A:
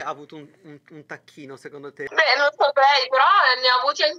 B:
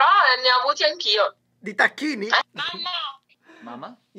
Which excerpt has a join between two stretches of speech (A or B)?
B